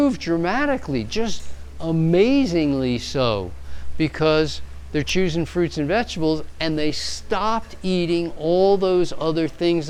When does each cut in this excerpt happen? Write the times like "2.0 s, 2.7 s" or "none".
none